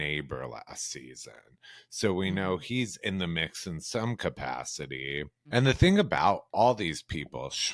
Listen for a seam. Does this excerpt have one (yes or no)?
yes